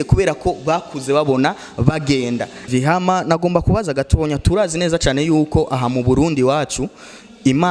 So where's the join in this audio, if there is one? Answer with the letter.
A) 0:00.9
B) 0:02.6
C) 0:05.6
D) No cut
B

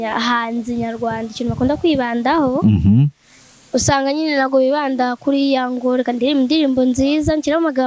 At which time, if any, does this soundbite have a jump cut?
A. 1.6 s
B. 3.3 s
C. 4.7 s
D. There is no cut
D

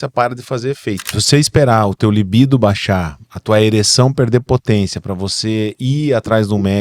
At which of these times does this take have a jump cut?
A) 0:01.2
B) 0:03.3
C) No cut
A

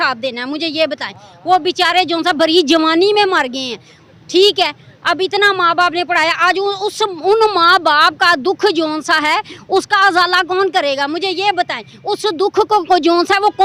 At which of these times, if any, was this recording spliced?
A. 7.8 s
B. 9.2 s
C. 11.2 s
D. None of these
D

